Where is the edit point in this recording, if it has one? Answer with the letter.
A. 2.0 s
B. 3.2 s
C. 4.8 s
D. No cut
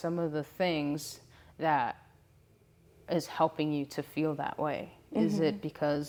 D